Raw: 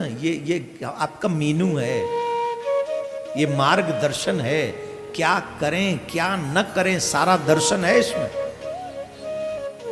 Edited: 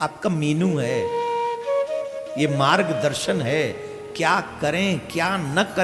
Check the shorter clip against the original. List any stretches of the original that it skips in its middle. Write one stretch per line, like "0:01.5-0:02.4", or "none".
none